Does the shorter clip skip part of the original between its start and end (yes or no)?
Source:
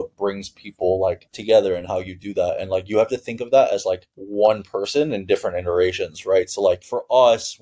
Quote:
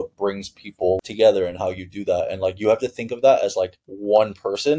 yes